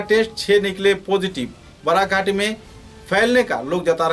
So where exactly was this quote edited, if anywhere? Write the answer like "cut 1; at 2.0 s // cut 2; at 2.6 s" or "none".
none